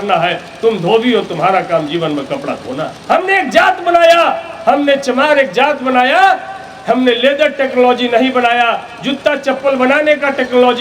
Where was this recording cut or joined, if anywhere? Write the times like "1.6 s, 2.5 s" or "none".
3.0 s